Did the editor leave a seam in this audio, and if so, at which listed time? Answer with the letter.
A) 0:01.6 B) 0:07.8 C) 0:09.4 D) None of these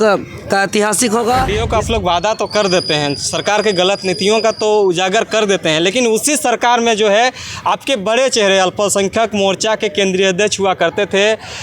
A